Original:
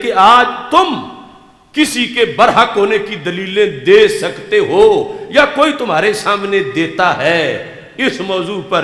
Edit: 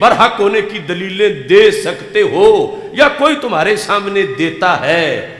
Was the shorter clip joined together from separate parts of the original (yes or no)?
no